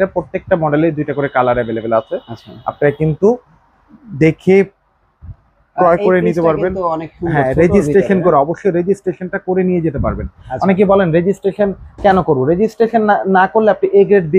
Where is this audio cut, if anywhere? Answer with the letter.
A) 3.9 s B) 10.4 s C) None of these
C